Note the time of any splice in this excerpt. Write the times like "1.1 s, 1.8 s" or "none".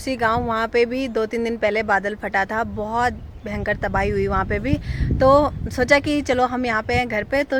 none